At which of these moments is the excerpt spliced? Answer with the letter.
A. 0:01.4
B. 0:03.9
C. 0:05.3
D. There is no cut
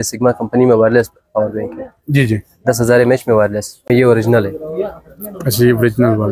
B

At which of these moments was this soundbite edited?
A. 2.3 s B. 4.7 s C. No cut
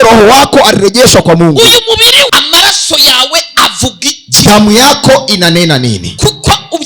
A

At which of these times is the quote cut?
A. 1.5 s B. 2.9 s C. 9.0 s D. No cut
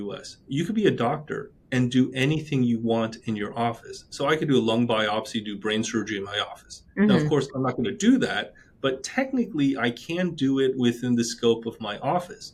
D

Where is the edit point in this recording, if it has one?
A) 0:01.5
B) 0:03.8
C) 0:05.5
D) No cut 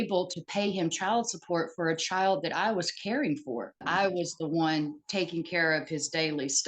B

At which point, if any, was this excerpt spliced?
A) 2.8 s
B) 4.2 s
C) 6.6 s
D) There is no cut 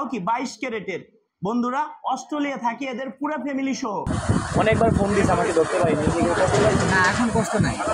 B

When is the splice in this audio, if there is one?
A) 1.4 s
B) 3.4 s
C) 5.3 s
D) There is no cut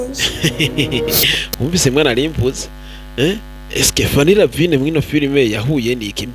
D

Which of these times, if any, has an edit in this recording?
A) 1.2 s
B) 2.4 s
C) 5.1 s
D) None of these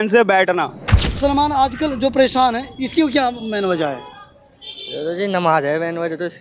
A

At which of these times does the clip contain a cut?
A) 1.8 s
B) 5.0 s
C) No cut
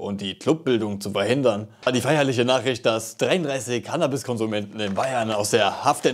A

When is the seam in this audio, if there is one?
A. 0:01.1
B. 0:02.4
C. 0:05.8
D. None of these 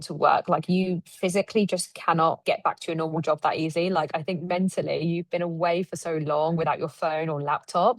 B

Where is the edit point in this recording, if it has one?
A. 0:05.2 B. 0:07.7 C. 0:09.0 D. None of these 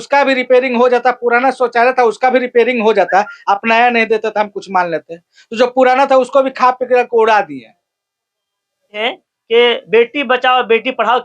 C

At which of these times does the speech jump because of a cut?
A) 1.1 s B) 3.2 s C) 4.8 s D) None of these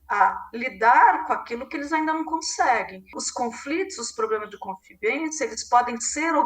B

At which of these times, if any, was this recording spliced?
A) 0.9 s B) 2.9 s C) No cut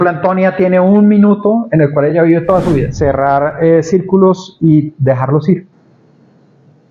B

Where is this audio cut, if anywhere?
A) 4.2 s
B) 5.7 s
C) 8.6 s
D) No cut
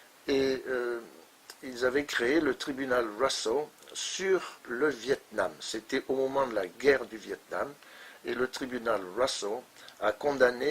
B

